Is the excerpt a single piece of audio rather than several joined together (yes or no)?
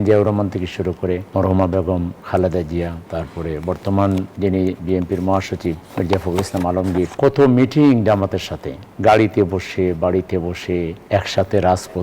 no